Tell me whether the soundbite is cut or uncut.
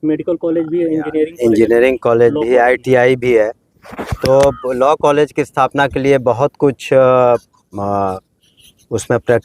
uncut